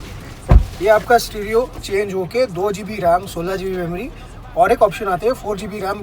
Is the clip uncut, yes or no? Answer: yes